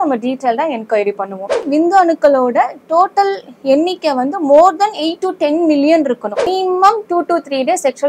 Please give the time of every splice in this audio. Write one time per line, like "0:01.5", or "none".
0:01.6
0:06.5